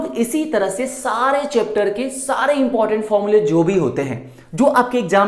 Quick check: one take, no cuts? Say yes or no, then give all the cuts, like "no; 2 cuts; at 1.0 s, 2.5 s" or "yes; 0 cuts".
yes; 0 cuts